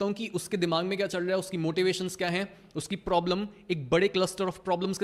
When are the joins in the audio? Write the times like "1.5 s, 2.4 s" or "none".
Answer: none